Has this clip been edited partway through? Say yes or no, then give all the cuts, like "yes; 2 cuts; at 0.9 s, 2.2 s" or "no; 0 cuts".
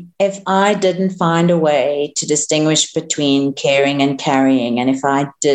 no; 0 cuts